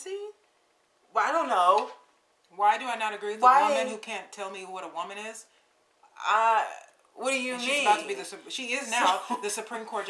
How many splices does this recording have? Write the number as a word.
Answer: zero